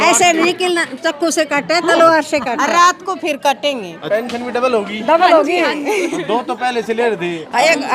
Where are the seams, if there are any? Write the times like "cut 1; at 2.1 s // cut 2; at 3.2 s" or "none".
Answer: cut 1; at 4.0 s